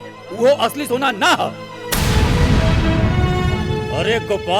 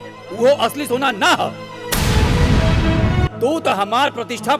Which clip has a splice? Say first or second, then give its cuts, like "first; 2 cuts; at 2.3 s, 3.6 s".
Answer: second; 1 cut; at 3.3 s